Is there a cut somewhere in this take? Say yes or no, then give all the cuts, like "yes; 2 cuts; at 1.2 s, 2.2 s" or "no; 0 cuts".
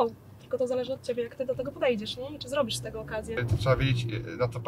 yes; 1 cut; at 3.4 s